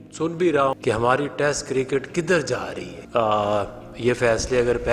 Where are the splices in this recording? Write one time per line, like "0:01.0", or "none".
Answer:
0:00.8
0:03.0